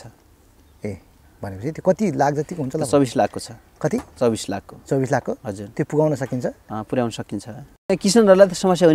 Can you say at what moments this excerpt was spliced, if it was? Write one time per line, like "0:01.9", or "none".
0:07.9